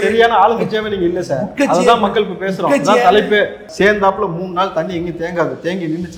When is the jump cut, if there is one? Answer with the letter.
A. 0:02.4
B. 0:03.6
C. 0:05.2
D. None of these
B